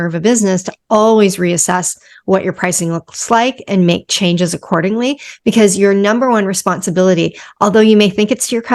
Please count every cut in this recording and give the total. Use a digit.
0